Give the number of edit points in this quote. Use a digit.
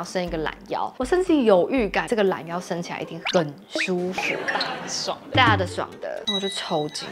0